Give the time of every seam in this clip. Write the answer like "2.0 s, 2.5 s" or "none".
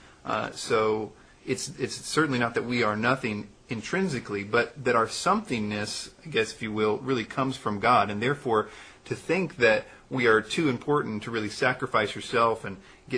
3.9 s